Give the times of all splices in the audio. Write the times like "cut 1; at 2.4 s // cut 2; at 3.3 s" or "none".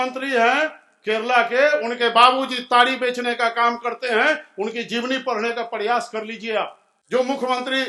none